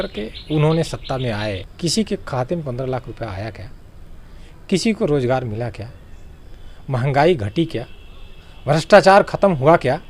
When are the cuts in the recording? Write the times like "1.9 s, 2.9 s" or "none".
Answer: 1.7 s